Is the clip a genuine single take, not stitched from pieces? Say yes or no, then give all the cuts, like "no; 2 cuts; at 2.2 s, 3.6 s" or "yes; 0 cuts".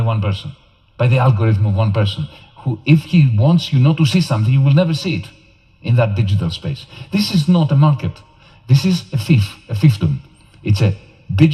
yes; 0 cuts